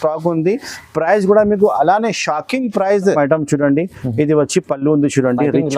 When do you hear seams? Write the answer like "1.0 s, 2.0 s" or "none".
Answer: 3.1 s